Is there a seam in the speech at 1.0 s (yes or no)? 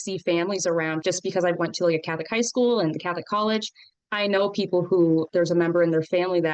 yes